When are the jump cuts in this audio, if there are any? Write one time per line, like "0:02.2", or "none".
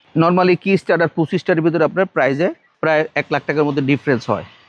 0:02.7